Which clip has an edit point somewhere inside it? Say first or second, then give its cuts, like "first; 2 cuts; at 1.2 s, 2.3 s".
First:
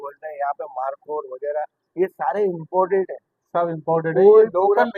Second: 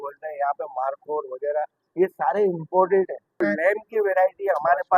second; 1 cut; at 3.4 s